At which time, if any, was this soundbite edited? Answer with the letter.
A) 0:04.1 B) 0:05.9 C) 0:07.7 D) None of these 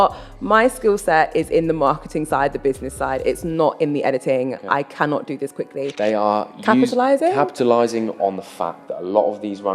B